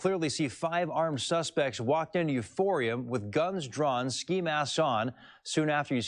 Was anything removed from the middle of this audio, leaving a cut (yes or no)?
no